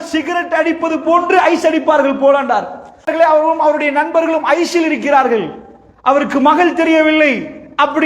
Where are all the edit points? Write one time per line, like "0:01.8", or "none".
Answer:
0:03.1